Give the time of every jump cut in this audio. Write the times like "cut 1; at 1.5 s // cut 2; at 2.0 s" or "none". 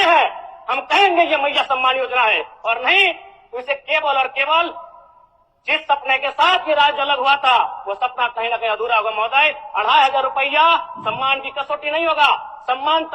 none